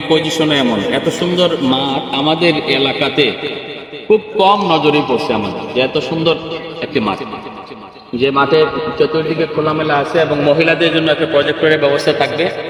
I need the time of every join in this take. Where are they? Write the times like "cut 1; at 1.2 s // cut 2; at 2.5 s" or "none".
none